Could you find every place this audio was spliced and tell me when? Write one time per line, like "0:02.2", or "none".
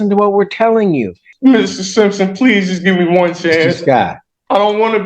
0:01.2